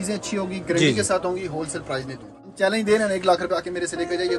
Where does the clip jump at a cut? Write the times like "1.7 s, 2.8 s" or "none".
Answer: 2.5 s